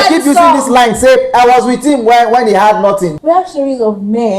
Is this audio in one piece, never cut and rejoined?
no; 1 cut; at 3.1 s

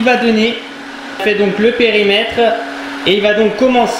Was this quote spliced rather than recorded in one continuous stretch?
yes; 1 cut; at 1.1 s

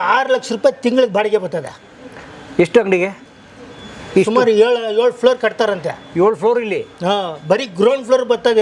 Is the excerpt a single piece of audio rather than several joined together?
yes; 0 cuts

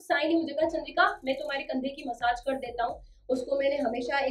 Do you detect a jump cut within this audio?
no; 0 cuts

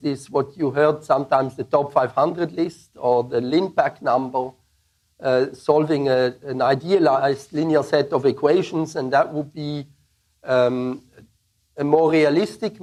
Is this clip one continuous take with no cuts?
yes; 0 cuts

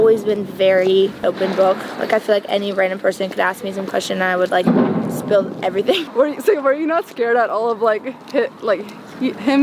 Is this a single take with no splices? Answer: no; 2 cuts; at 1.2 s, 6.0 s

